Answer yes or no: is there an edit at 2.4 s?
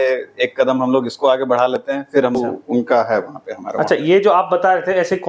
yes